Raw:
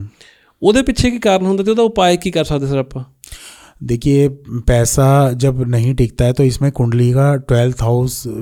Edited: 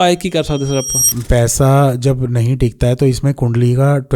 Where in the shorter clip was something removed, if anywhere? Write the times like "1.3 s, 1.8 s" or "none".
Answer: 1.1 s

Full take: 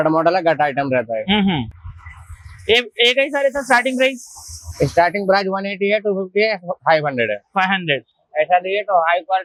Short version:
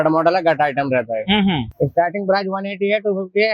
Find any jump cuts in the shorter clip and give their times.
1.7 s

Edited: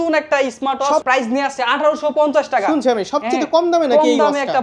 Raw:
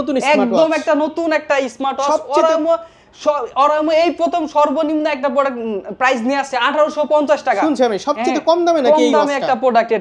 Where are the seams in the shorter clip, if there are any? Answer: 1.0 s

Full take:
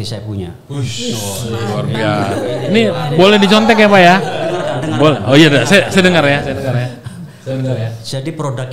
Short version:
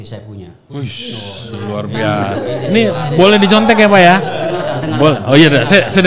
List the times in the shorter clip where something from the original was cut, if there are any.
none

